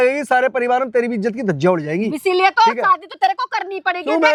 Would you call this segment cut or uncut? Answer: uncut